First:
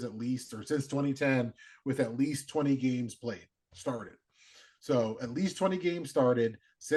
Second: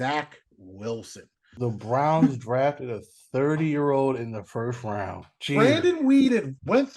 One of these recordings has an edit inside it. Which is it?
second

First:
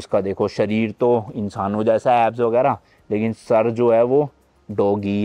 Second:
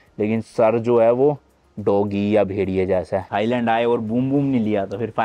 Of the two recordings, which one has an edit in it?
second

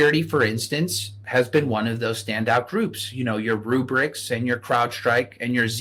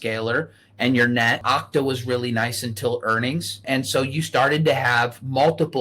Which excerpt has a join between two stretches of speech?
second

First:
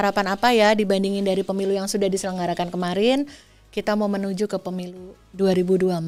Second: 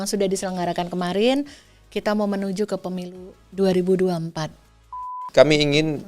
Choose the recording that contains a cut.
second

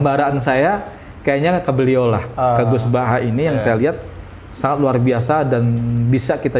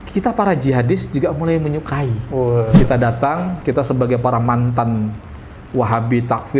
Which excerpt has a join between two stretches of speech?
second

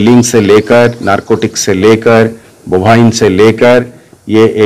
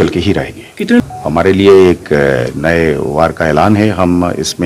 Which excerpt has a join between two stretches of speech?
second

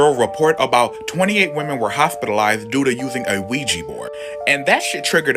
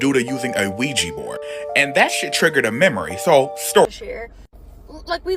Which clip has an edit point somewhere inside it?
second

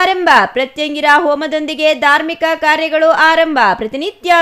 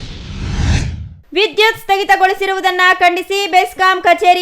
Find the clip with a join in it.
second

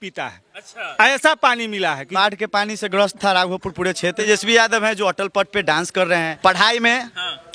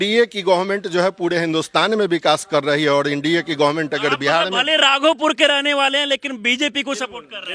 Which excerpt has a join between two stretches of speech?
first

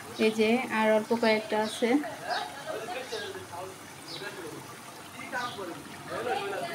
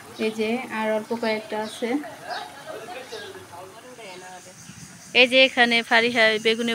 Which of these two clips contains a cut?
second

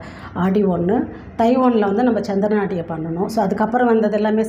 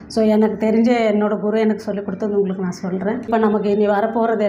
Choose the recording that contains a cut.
second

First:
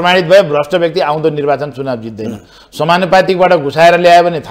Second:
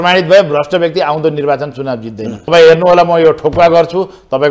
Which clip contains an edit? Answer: second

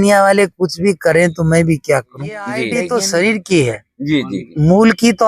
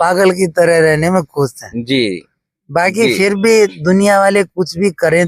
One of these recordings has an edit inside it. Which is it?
first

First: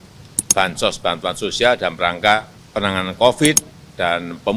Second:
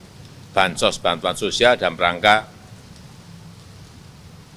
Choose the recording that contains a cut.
first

